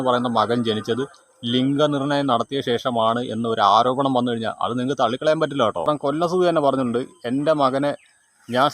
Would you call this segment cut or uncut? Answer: cut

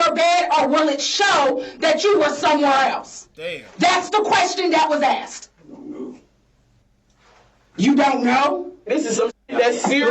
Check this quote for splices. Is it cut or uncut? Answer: cut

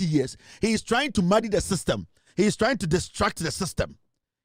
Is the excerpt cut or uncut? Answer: uncut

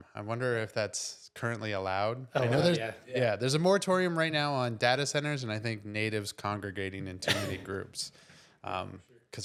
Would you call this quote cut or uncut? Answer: uncut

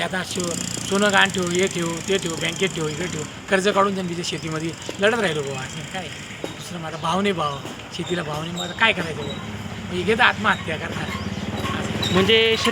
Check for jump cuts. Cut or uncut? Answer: uncut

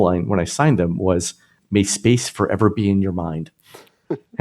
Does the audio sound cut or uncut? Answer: uncut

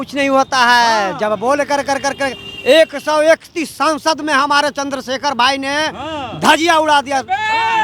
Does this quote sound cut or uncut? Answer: uncut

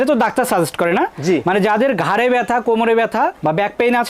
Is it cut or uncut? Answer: uncut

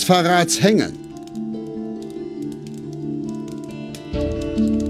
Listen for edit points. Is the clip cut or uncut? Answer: cut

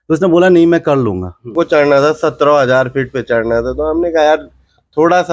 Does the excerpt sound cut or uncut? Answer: cut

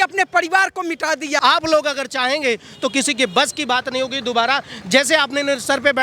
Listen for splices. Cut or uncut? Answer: cut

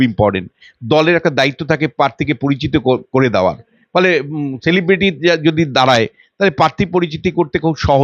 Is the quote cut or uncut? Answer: uncut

